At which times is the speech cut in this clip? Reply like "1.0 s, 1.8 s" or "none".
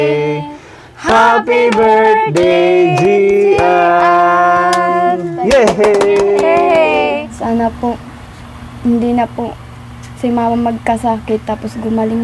7.3 s